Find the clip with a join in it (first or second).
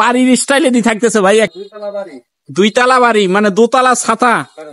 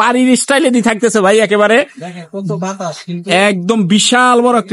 first